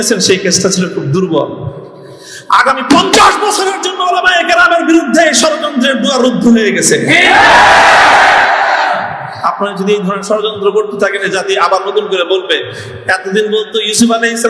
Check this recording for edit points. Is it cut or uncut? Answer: uncut